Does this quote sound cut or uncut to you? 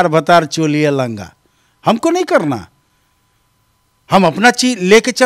uncut